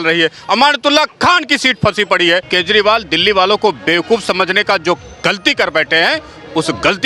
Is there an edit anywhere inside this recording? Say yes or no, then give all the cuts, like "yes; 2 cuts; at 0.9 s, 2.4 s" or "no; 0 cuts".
yes; 1 cut; at 2.5 s